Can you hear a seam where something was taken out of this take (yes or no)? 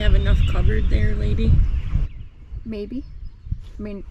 no